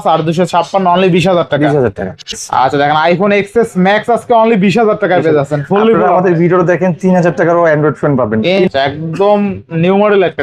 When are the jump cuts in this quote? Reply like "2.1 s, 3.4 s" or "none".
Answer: 2.3 s, 8.6 s